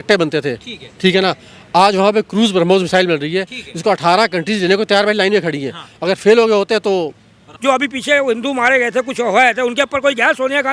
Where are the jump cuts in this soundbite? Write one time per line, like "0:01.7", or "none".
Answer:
0:07.5